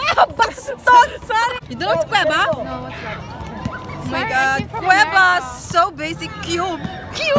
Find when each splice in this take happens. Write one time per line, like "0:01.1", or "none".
0:01.6